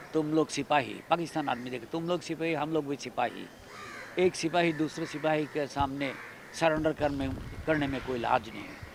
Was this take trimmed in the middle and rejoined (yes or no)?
no